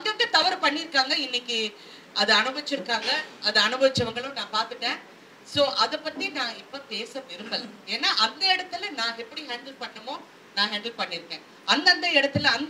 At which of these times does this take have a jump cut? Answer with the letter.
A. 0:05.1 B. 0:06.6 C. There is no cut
C